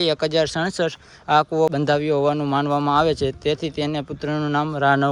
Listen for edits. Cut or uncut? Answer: uncut